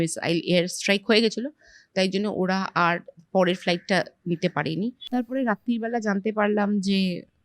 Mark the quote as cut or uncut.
cut